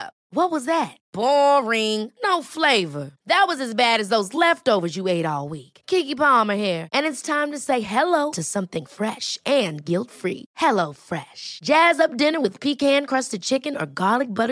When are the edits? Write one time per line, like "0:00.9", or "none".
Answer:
none